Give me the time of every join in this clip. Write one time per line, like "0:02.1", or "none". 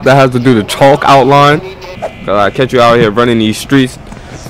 0:01.8